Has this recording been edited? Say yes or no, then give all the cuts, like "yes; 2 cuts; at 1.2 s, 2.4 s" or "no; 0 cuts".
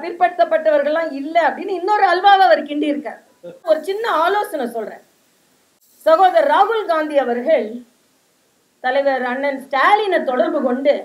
yes; 1 cut; at 3.7 s